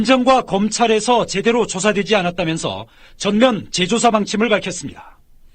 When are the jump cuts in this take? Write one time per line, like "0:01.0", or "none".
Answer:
0:02.3